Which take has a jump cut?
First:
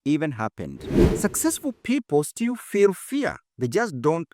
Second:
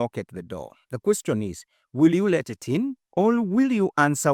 first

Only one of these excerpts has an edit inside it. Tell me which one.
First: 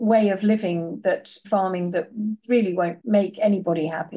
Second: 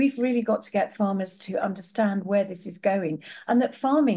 first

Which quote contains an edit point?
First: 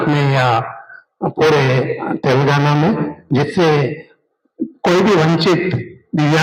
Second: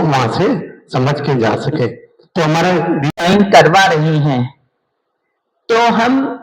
second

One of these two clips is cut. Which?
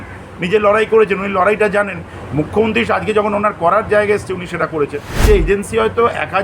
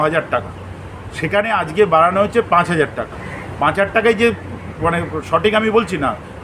first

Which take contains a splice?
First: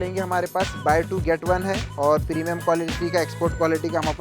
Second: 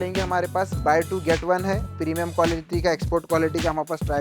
second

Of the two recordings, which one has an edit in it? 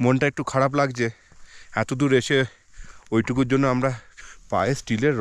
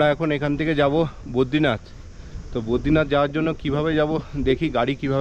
first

